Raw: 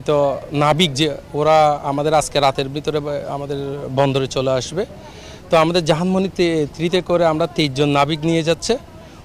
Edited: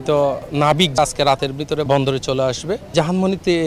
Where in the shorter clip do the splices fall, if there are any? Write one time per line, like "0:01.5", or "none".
0:01.0
0:01.9
0:02.9